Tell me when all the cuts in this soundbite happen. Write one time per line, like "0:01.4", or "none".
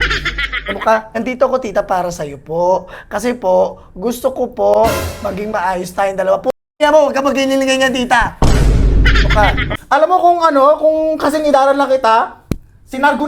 0:01.1
0:09.7